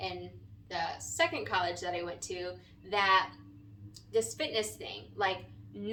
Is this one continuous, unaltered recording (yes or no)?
yes